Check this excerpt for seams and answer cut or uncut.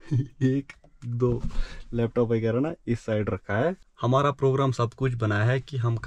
uncut